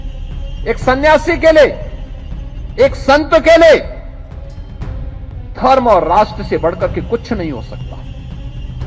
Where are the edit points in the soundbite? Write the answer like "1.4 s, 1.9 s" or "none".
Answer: 7.9 s